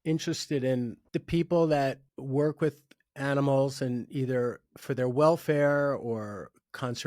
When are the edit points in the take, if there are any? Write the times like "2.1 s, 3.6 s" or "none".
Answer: 1.0 s, 2.1 s